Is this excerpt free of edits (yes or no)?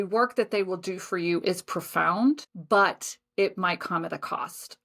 no